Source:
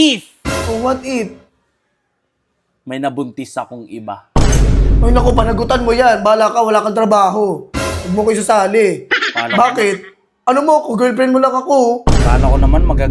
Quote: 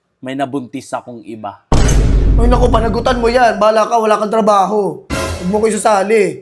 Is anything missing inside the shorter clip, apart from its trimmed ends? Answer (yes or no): no